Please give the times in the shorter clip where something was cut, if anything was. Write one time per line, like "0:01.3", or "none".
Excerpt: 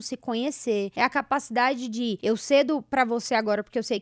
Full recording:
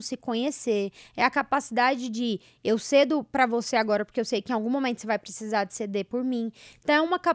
0:00.9
0:02.2